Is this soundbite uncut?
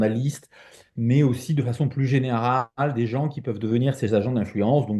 yes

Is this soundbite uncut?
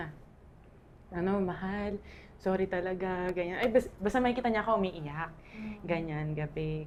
yes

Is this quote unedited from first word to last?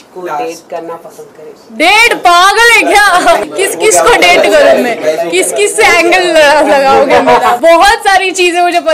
no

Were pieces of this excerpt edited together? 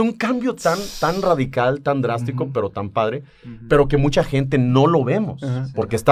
no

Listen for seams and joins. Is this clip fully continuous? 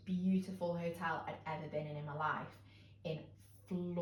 yes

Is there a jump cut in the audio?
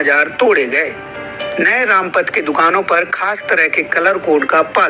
no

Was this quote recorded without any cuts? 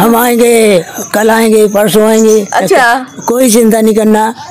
yes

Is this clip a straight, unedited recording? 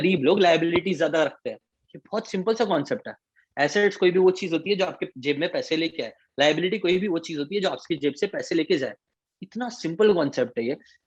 yes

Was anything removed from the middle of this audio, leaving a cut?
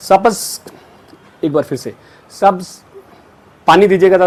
no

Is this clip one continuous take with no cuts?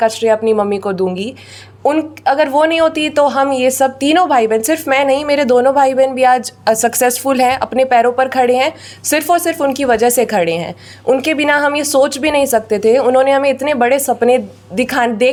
yes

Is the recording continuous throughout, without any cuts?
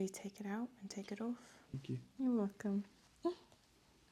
no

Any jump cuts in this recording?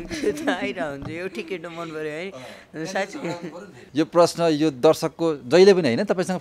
yes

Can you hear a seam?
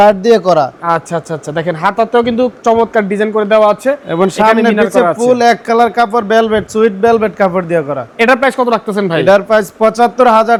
no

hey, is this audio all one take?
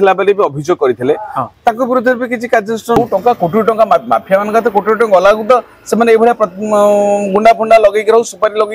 no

